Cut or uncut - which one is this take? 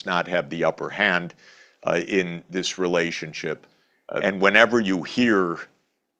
cut